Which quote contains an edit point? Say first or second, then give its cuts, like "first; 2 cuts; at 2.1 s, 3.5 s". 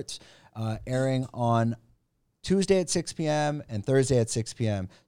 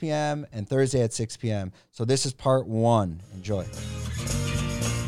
second; 1 cut; at 3.4 s